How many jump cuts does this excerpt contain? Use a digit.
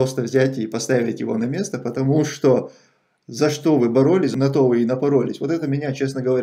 1